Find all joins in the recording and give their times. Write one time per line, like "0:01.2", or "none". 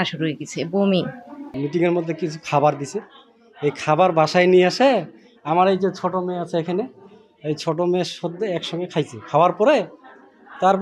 0:01.5